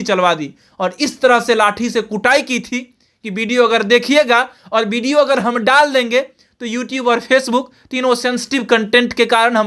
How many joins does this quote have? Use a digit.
0